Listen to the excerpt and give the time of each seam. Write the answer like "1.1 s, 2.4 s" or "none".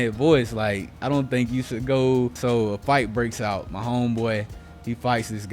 2.4 s